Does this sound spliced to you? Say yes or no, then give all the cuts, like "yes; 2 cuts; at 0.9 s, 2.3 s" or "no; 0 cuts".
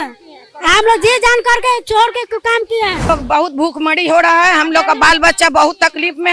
yes; 1 cut; at 3.1 s